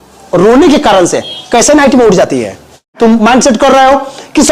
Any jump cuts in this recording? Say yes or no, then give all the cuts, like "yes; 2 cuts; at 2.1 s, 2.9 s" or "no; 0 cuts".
yes; 1 cut; at 3.0 s